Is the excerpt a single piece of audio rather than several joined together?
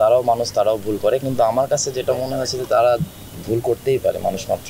yes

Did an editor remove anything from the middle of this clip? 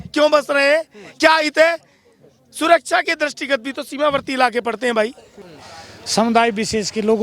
yes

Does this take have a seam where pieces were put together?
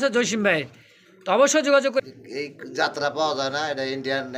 yes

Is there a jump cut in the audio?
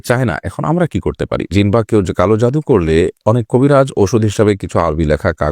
yes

